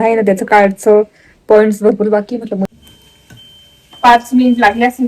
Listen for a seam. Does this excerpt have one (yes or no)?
yes